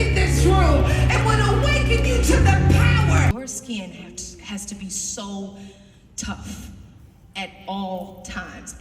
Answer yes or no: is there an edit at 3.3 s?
yes